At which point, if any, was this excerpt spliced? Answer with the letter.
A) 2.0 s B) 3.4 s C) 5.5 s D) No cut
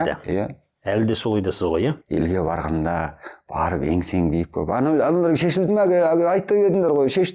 A